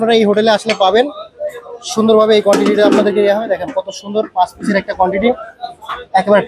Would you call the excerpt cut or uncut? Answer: uncut